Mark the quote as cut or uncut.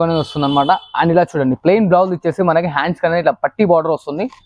uncut